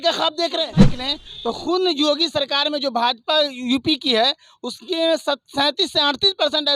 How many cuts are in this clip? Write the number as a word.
one